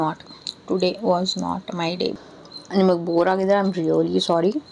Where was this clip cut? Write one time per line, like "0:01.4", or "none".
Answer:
0:02.1

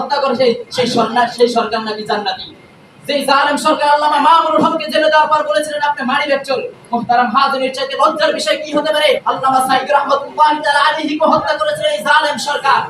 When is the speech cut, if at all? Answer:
0:02.7
0:09.2

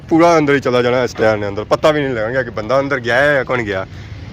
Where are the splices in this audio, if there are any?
none

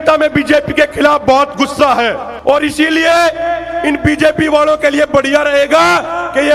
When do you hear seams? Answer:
0:02.3

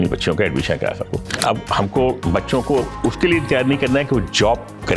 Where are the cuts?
0:01.4

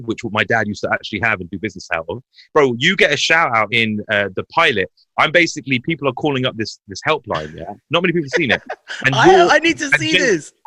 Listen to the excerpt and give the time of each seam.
0:02.3
0:03.7

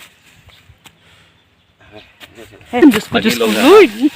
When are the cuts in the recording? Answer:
0:02.8

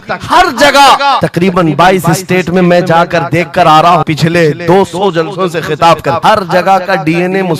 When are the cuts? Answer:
0:01.2
0:04.0
0:06.2

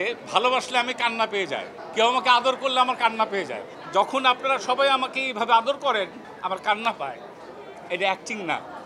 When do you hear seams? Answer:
none

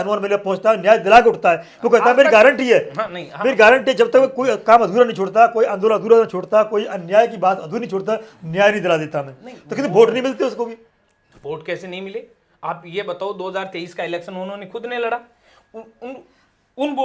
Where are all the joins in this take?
none

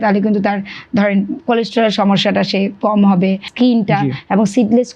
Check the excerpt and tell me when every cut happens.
0:03.5

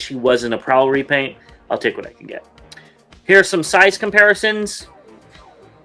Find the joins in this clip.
none

